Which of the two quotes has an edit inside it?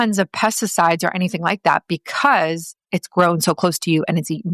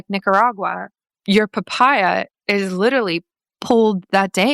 second; 2 cuts; at 1.1 s, 3.5 s

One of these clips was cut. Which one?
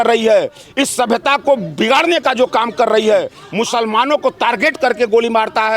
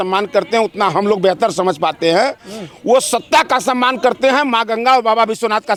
first; 1 cut; at 3.4 s

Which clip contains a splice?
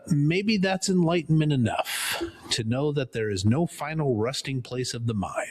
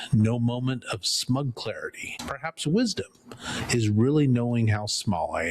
second; 1 cut; at 2.1 s

